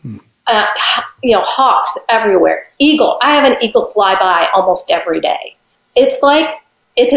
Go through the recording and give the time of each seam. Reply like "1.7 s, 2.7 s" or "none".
5.8 s